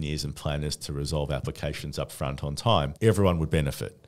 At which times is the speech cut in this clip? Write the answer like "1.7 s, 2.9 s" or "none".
2.9 s